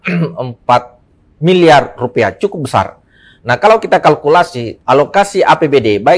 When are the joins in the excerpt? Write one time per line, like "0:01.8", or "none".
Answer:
0:04.7